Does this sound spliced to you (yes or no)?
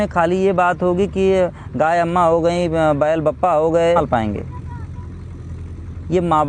yes